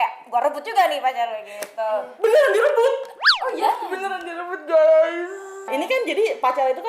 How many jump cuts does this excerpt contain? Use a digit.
1